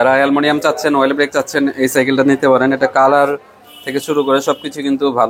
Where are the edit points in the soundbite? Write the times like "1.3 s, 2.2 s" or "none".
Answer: none